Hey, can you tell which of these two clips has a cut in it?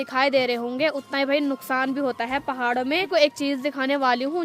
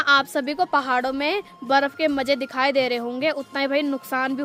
first; 1 cut; at 3.1 s

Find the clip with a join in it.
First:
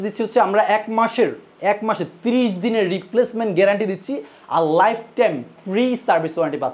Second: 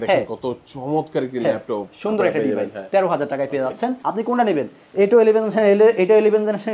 second; 1 cut; at 4.0 s

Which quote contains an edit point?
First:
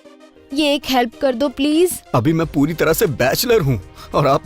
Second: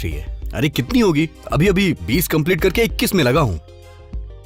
first; 1 cut; at 2.0 s

